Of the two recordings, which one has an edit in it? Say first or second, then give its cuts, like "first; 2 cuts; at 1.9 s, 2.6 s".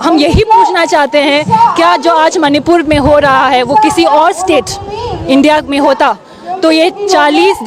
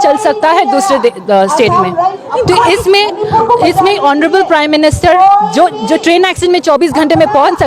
second; 1 cut; at 2.2 s